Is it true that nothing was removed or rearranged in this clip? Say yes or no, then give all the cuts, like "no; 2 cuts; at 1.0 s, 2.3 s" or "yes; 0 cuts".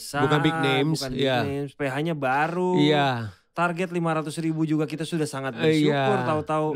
yes; 0 cuts